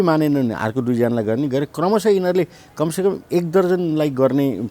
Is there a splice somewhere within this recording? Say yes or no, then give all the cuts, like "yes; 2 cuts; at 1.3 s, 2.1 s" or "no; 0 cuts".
no; 0 cuts